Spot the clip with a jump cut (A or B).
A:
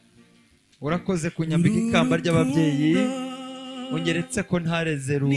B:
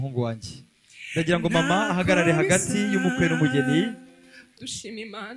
B